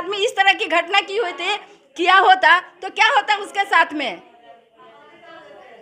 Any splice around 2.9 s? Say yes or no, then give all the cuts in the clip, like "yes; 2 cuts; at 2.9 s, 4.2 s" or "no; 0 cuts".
no; 0 cuts